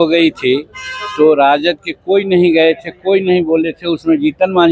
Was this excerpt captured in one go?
yes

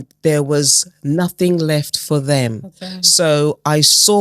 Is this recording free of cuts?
yes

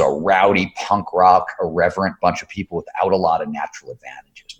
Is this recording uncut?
yes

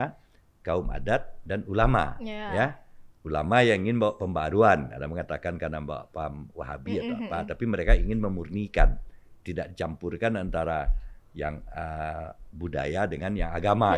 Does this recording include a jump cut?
no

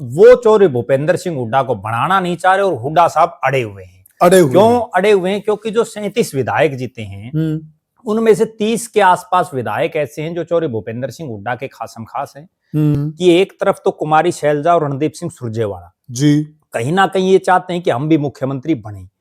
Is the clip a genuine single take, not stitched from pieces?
no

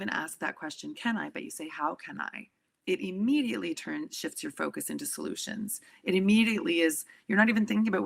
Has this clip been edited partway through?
no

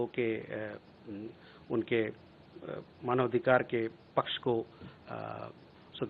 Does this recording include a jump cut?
no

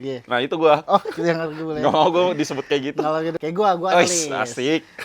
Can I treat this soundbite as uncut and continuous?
no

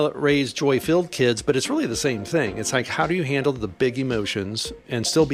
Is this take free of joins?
yes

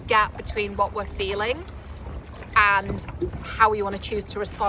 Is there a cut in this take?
no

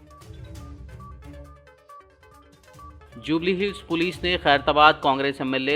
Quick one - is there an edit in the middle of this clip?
yes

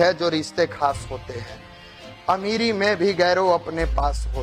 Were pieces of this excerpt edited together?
no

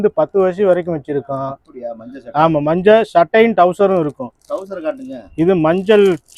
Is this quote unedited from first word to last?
yes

